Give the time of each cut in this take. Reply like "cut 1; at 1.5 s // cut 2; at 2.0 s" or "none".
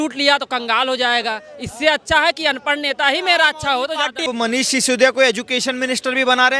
cut 1; at 4.2 s